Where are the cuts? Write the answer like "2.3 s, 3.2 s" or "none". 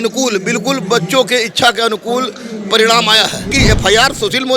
3.5 s